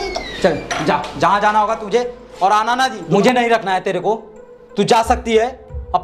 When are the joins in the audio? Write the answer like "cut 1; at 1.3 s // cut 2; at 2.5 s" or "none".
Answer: cut 1; at 3.0 s